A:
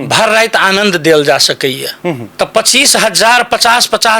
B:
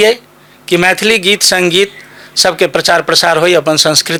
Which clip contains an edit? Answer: A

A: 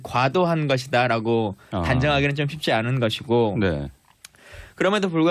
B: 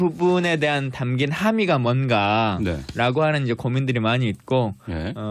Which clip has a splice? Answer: A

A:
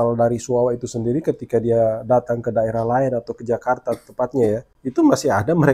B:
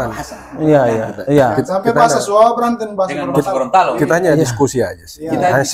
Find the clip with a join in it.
A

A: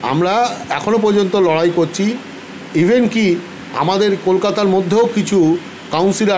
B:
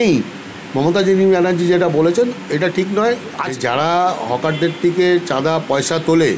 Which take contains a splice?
B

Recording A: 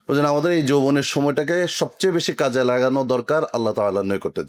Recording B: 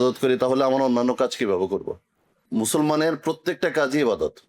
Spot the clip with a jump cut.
B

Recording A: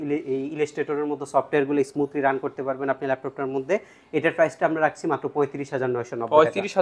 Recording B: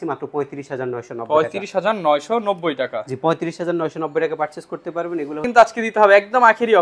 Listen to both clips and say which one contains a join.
B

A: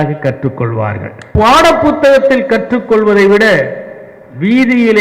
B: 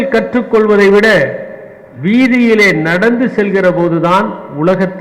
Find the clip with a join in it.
A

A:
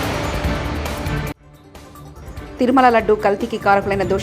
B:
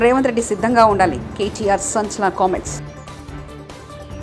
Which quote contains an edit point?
A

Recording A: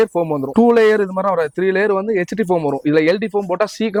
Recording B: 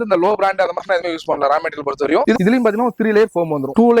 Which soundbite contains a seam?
B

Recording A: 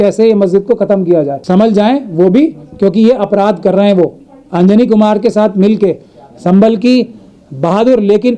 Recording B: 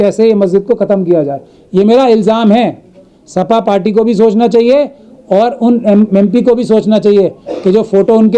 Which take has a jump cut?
A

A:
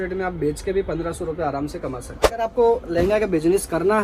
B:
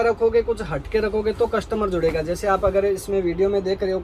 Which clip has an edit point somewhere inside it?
A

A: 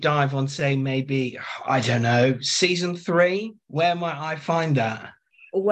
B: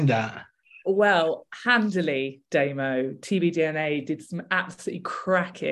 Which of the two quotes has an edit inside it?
A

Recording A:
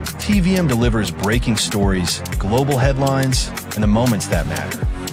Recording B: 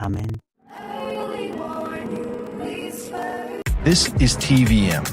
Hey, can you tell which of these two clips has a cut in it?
B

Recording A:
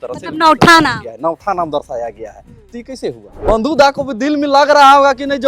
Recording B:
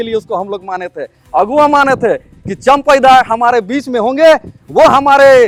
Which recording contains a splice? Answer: A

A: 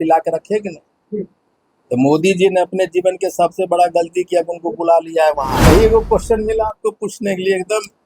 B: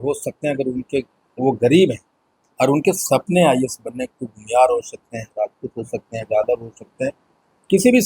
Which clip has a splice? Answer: A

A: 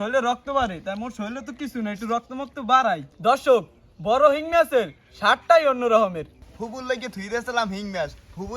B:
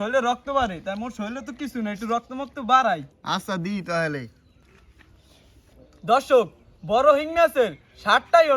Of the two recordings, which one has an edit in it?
A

